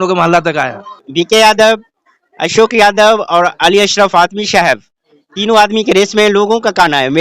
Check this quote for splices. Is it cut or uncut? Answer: cut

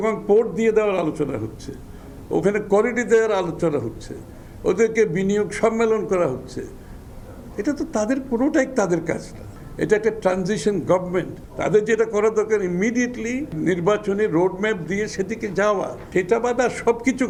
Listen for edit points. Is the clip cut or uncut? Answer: uncut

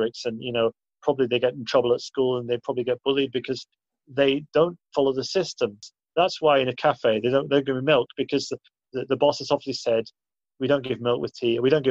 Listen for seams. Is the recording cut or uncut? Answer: cut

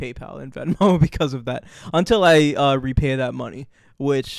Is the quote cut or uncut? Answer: uncut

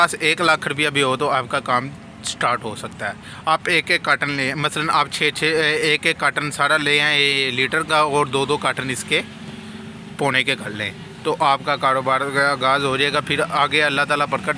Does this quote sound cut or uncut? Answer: uncut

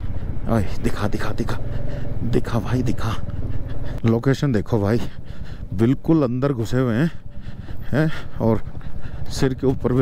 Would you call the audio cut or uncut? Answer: cut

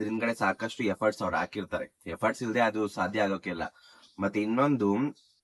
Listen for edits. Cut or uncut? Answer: uncut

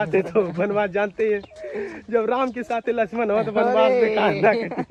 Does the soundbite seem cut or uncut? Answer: uncut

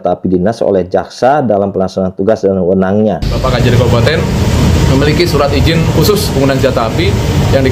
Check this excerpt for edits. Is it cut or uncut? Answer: cut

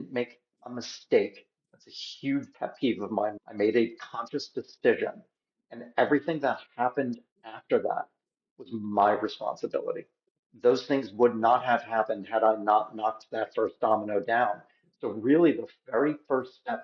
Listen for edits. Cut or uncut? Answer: uncut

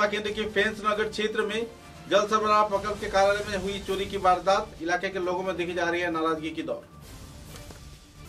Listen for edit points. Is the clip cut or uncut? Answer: uncut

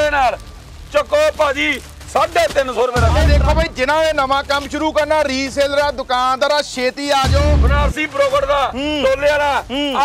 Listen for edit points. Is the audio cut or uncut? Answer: cut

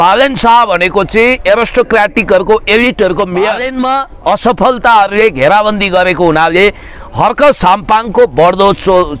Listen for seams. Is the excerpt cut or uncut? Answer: cut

